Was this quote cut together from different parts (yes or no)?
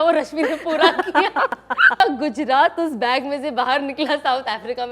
yes